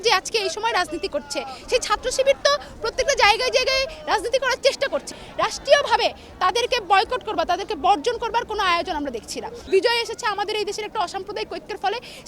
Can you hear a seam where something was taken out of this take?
yes; 3 cuts; at 1.6 s, 5.1 s, 9.7 s

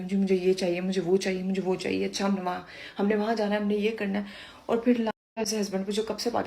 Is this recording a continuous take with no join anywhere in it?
no; 1 cut; at 5.1 s

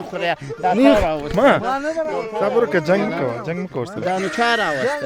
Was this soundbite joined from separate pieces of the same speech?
no; 0 cuts

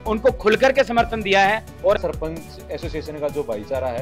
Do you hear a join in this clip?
yes; 1 cut; at 2.0 s

